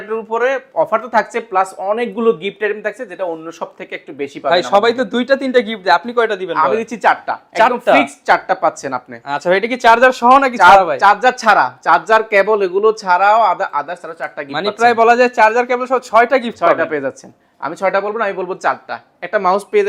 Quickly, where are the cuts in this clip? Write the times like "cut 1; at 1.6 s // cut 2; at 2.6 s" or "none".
none